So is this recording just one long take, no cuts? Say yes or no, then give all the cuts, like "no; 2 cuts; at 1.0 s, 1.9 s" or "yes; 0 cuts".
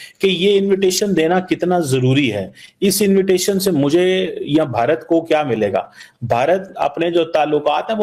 yes; 0 cuts